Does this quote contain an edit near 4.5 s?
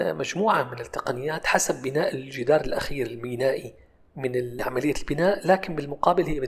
yes; 1 cut; at 4.5 s

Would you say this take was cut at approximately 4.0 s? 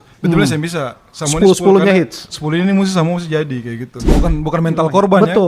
yes; 1 cut; at 4.0 s

